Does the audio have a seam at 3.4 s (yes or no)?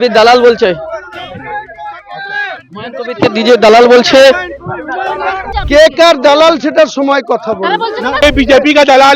no